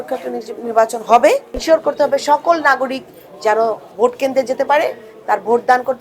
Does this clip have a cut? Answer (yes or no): yes